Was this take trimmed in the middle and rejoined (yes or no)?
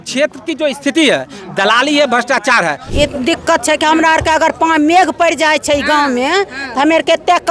yes